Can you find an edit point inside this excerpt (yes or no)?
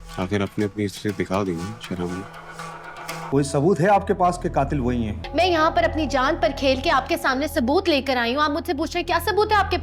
yes